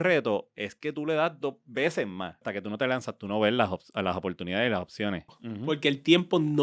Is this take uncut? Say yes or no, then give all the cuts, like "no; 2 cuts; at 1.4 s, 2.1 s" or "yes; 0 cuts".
no; 2 cuts; at 2.5 s, 5.3 s